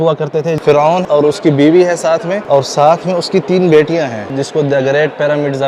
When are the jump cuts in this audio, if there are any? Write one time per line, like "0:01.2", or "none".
0:01.0
0:02.4
0:04.3